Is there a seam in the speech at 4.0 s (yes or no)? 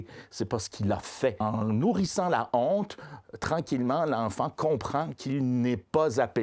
no